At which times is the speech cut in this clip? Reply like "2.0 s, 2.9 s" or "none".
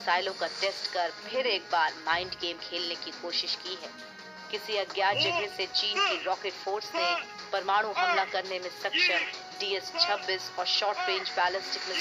none